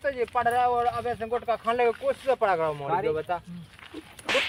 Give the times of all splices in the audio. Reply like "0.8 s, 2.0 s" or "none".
none

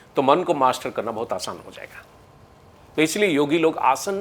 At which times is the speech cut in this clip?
none

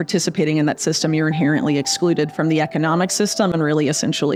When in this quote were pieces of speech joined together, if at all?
none

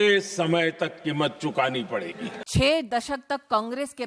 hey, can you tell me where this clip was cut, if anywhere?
2.4 s

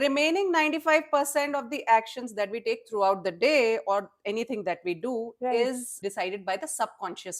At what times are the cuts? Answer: 5.9 s

